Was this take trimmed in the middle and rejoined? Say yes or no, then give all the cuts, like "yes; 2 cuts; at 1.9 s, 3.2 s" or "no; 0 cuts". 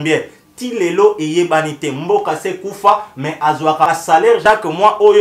yes; 1 cut; at 3.9 s